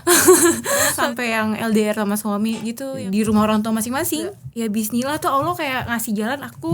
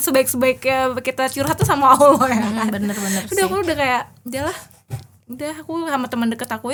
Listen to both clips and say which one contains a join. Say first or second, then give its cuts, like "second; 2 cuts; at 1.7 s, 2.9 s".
first; 3 cuts; at 1.0 s, 2.9 s, 4.4 s